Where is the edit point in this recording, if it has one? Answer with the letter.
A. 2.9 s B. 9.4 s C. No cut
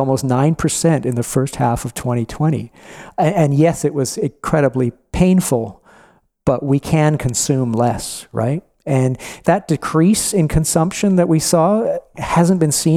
B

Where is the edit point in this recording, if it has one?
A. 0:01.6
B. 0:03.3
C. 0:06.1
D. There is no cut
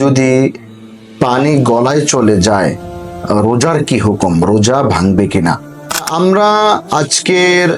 C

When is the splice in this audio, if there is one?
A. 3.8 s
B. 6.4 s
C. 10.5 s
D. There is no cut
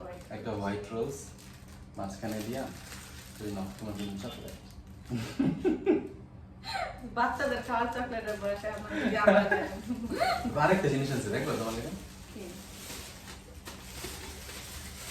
C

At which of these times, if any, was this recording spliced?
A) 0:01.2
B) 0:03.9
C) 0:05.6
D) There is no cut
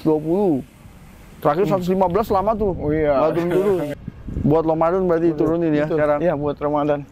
B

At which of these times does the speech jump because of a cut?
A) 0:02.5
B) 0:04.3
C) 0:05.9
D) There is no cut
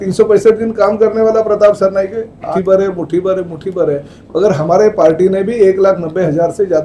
A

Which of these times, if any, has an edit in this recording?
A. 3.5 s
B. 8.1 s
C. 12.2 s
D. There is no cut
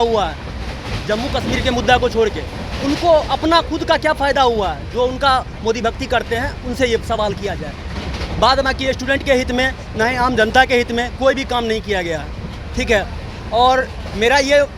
D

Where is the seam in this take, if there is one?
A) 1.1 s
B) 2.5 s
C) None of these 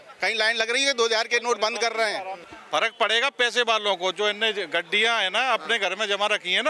B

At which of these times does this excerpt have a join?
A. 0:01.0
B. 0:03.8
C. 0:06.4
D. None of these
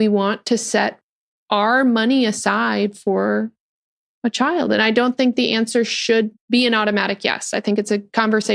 C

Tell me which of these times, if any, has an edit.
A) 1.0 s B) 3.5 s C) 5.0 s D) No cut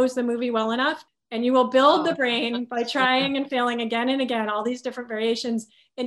A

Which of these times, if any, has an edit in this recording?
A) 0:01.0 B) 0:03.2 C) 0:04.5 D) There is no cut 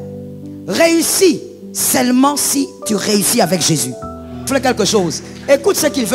C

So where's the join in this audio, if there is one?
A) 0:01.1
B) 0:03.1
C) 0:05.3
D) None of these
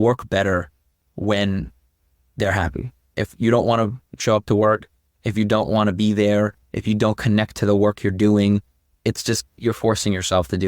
B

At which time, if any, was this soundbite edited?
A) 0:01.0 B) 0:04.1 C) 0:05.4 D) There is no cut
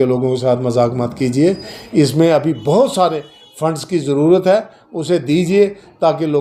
D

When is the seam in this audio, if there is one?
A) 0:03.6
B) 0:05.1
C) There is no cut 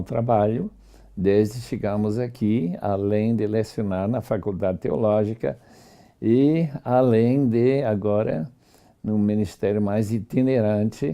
B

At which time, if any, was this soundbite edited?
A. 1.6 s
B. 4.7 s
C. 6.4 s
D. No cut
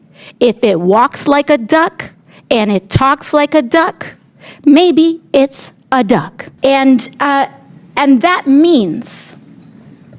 C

